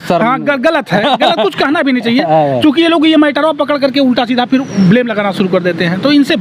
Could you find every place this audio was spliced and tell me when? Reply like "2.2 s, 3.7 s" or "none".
none